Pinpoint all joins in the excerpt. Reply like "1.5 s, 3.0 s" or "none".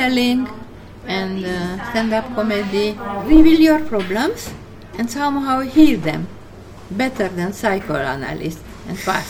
3.2 s